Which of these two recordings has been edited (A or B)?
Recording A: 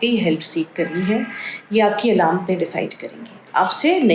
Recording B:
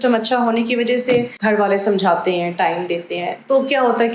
B